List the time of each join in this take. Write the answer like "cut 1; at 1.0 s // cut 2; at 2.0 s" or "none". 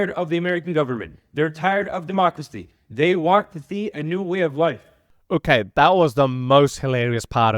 cut 1; at 4.9 s